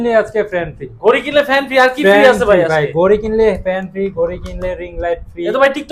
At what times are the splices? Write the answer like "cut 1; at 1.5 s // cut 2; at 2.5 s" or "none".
none